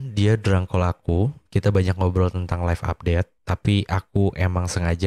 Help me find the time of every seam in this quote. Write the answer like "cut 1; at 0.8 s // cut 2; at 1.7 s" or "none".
cut 1; at 3.4 s